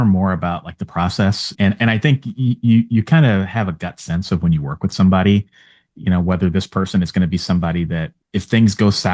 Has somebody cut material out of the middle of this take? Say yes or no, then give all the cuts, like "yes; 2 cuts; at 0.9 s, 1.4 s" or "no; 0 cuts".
yes; 1 cut; at 1.5 s